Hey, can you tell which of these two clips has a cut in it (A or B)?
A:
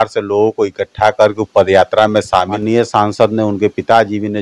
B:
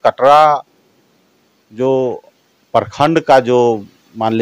A